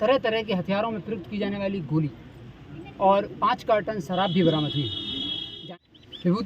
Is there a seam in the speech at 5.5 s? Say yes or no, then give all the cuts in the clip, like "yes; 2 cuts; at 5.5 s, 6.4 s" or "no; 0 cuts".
yes; 1 cut; at 5.5 s